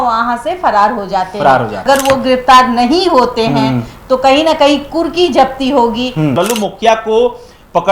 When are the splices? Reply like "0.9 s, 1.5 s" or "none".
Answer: 1.8 s, 6.3 s